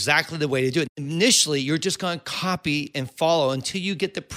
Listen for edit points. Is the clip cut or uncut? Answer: cut